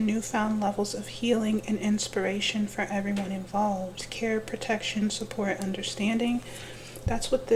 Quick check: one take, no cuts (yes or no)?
yes